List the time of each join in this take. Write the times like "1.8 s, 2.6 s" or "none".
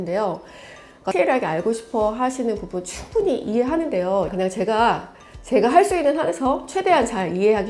1.0 s, 4.3 s